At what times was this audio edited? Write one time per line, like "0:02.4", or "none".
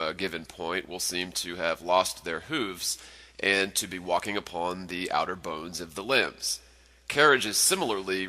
0:05.7